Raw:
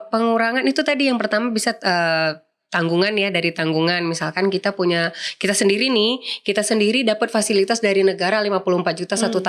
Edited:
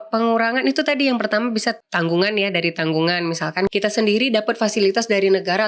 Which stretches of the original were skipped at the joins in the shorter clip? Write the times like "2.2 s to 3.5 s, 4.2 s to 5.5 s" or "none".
1.8 s to 2.6 s, 4.5 s to 6.4 s